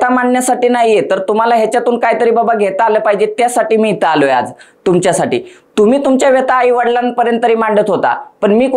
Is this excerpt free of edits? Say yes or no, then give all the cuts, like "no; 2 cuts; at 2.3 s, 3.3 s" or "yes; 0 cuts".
yes; 0 cuts